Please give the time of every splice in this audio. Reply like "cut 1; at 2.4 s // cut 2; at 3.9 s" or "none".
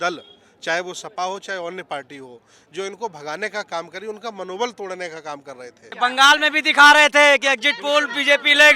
cut 1; at 5.9 s

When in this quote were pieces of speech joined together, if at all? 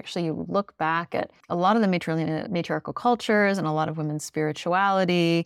cut 1; at 1.4 s // cut 2; at 2.4 s

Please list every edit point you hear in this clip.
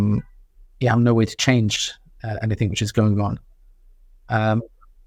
none

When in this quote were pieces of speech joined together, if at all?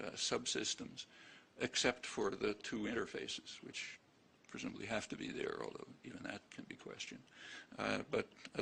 none

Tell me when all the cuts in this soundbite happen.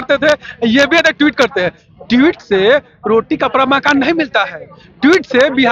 none

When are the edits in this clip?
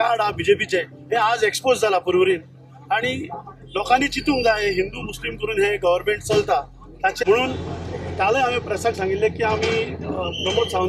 cut 1; at 7.2 s

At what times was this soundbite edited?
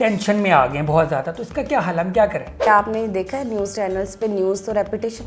cut 1; at 2.6 s

